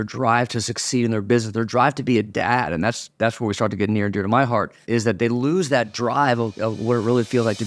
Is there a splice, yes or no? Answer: yes